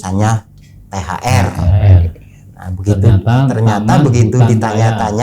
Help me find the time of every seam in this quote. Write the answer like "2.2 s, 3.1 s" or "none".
none